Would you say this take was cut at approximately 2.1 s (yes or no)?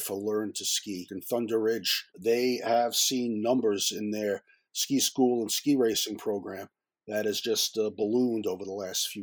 yes